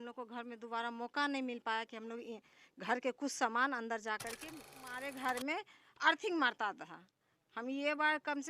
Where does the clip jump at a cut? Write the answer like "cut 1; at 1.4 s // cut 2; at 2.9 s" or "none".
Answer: cut 1; at 4.7 s